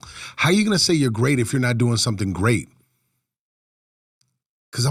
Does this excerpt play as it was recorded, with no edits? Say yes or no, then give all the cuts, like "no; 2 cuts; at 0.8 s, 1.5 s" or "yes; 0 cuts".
yes; 0 cuts